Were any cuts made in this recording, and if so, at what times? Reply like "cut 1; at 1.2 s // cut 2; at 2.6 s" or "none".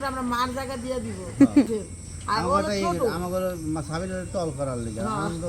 cut 1; at 1.6 s